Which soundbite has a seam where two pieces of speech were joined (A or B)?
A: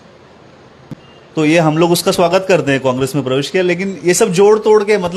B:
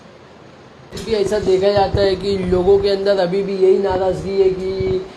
B